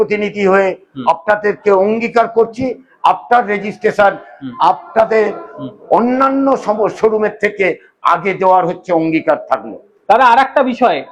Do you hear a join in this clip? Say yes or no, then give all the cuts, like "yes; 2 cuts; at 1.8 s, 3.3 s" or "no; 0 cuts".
no; 0 cuts